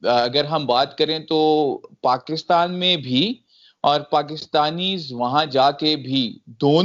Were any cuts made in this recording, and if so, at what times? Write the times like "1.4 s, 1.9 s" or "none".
none